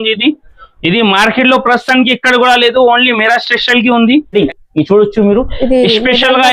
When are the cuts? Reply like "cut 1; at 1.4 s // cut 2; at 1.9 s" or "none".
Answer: cut 1; at 4.3 s